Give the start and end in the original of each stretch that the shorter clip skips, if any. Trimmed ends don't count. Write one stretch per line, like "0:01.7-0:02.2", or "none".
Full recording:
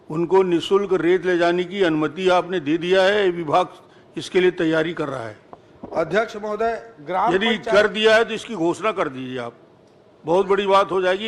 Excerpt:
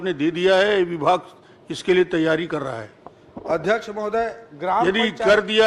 none